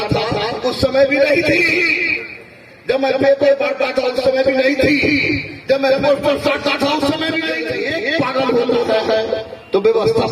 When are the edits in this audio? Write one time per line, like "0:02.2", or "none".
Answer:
0:07.7